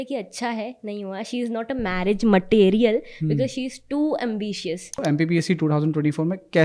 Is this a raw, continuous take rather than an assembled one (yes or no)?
no